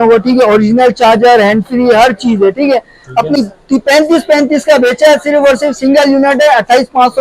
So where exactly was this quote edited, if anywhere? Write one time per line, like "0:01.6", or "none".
0:03.4